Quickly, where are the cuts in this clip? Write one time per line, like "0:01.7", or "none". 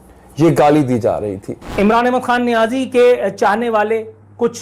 0:01.6